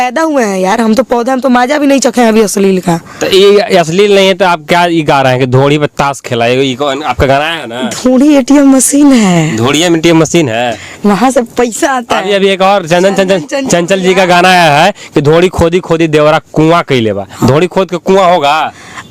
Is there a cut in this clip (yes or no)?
no